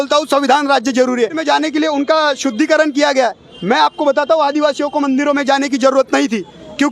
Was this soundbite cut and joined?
yes; 1 cut; at 1.4 s

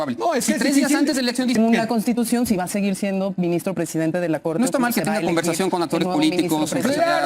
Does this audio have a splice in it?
yes; 1 cut; at 1.6 s

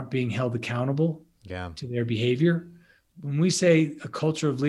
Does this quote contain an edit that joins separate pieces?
yes; 1 cut; at 3.2 s

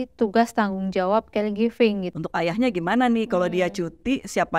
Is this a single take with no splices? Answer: no; 1 cut; at 2.1 s

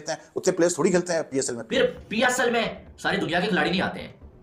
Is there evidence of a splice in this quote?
yes; 1 cut; at 1.6 s

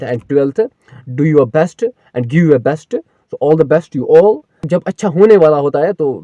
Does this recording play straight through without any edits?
no; 1 cut; at 4.5 s

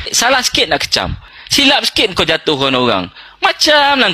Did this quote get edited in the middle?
yes; 1 cut; at 1.3 s

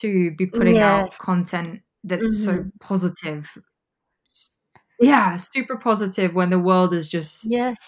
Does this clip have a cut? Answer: yes; 1 cut; at 3.9 s

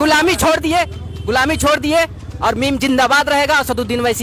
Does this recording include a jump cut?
no; 0 cuts

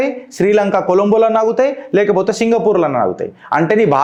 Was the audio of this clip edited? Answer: no; 0 cuts

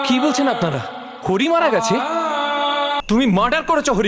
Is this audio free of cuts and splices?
no; 1 cut; at 3.0 s

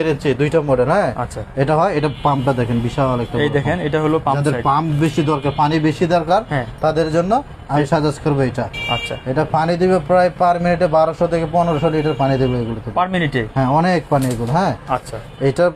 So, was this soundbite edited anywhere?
no; 0 cuts

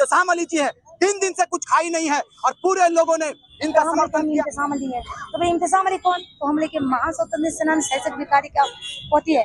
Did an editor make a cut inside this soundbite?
yes; 1 cut; at 4.0 s

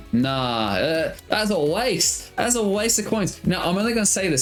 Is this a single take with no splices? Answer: yes; 0 cuts

